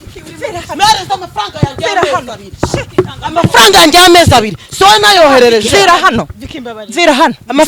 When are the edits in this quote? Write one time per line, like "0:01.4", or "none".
none